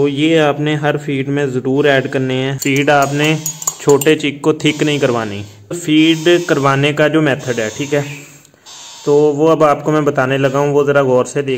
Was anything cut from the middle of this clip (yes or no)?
yes